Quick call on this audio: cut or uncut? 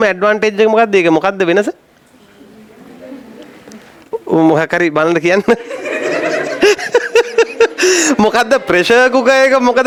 uncut